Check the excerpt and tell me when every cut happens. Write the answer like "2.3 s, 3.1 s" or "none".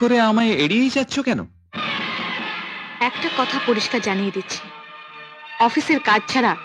none